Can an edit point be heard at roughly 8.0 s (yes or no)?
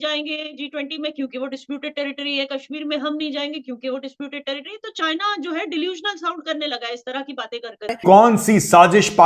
yes